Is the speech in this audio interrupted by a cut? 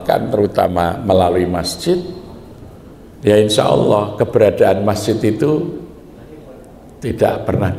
no; 0 cuts

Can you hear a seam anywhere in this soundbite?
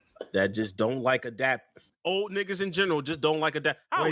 no; 0 cuts

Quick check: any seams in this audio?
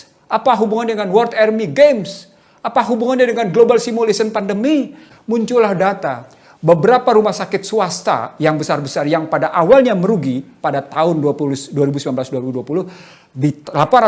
yes; 1 cut; at 5.0 s

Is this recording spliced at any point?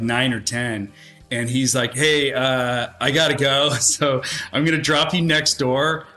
no; 0 cuts

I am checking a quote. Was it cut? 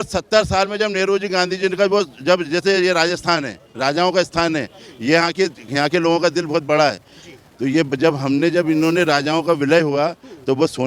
no; 0 cuts

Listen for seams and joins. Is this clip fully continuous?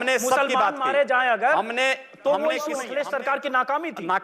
no; 1 cut; at 2.8 s

